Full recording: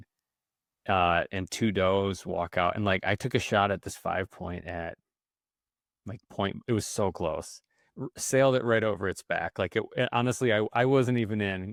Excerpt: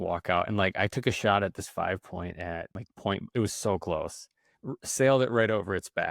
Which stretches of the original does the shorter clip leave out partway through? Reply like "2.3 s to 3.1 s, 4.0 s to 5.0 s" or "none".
5.1 s to 6.1 s